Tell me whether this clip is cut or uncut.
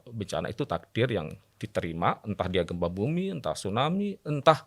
uncut